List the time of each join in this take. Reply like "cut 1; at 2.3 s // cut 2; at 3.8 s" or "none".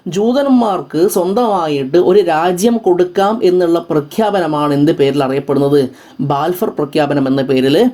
none